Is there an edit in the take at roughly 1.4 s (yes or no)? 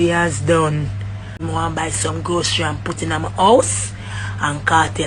yes